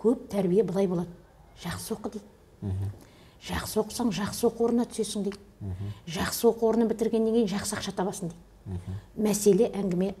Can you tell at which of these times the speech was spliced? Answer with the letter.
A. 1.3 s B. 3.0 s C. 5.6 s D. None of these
D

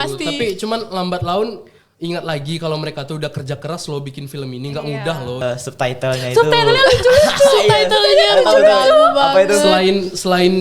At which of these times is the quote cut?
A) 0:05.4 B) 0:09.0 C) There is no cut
A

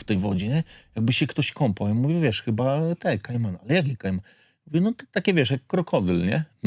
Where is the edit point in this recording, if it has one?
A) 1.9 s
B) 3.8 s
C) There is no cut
C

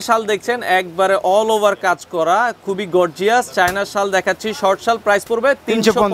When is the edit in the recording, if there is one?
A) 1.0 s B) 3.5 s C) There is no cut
C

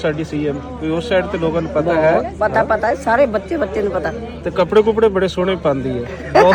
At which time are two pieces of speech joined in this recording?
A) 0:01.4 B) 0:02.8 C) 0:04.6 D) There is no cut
D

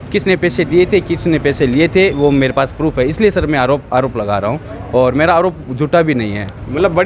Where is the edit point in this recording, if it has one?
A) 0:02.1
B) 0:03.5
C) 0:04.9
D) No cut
D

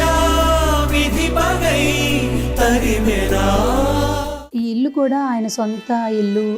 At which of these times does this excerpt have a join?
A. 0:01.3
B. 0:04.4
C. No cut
B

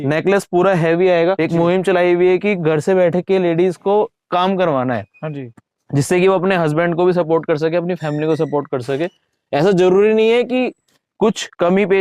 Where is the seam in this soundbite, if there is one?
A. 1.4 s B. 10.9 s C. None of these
A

